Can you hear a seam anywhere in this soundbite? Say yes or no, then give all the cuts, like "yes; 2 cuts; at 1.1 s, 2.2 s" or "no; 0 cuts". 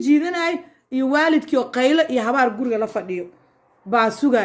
no; 0 cuts